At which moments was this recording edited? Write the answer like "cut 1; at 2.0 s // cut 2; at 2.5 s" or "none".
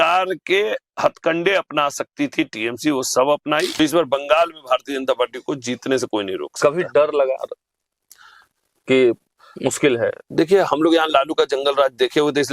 cut 1; at 3.7 s